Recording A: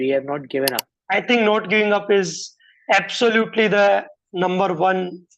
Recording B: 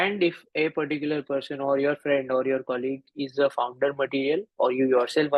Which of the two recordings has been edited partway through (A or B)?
A